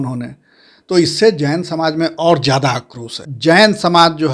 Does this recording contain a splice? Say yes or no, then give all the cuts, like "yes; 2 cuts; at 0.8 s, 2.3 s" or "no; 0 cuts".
yes; 1 cut; at 3.2 s